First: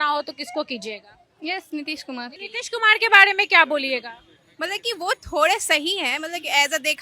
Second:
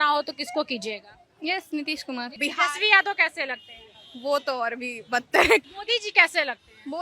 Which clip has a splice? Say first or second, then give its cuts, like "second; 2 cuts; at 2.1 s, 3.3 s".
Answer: second; 2 cuts; at 2.3 s, 5.6 s